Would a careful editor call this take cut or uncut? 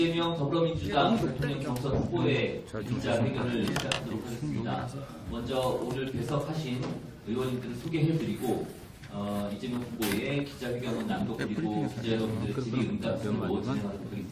uncut